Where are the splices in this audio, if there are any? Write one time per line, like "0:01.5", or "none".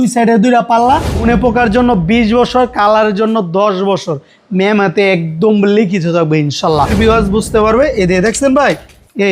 0:01.2
0:06.9